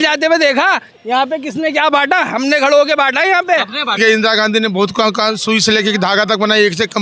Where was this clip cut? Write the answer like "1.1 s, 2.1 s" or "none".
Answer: 4.0 s